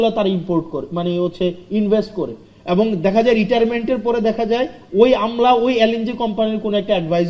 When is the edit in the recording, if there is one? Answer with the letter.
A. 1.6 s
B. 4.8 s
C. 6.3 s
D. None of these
D